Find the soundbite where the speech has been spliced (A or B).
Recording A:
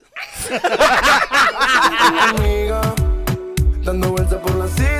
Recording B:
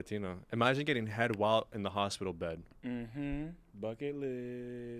A